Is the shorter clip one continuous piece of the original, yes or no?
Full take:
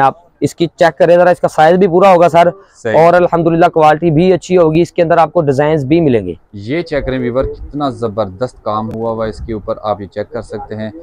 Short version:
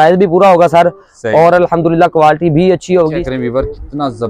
no